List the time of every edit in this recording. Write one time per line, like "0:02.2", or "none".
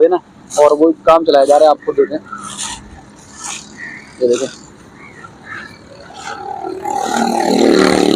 none